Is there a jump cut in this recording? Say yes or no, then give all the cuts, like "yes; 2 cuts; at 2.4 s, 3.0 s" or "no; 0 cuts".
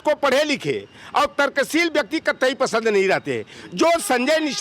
no; 0 cuts